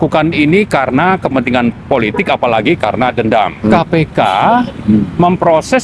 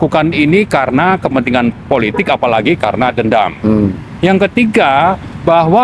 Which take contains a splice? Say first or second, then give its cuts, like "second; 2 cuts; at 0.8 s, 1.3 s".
first; 1 cut; at 3.7 s